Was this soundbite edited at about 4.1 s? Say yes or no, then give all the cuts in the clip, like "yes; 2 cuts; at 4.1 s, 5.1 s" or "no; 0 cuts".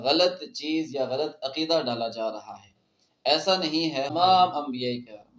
yes; 1 cut; at 4.1 s